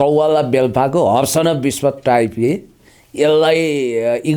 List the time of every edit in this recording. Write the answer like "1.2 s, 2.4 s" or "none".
none

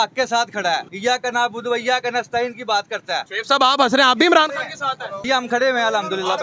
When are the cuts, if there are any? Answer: 0.9 s, 3.3 s, 5.1 s

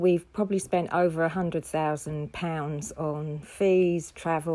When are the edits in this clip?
none

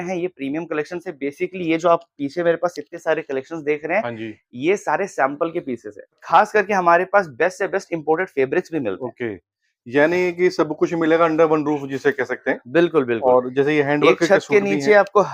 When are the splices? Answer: 6.2 s

